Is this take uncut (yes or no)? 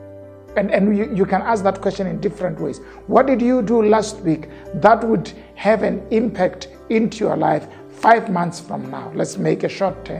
yes